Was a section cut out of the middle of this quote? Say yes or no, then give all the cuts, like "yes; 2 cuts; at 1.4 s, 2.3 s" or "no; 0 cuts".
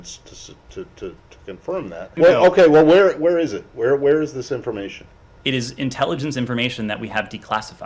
yes; 1 cut; at 2.1 s